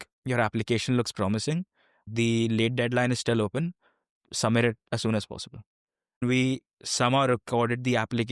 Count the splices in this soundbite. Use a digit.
2